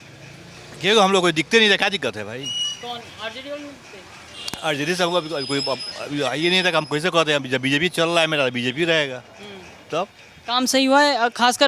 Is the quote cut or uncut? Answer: uncut